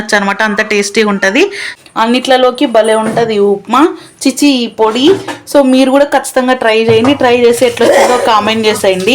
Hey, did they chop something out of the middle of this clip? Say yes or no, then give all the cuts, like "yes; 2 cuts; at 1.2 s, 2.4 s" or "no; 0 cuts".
yes; 1 cut; at 1.7 s